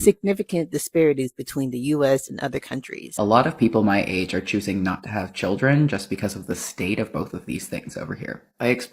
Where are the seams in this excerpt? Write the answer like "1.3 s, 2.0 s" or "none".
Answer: 3.2 s